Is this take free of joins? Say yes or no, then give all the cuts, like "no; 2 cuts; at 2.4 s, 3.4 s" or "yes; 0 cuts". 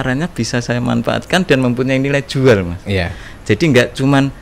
yes; 0 cuts